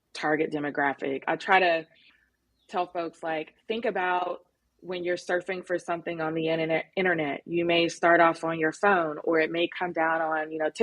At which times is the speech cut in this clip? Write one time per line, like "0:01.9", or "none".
0:01.2